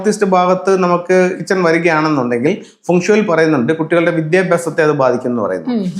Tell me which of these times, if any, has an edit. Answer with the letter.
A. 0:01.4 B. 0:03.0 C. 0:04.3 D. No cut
A